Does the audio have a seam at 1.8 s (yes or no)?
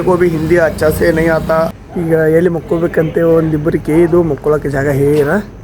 yes